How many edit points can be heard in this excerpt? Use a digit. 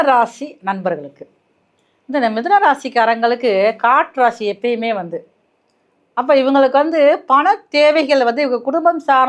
0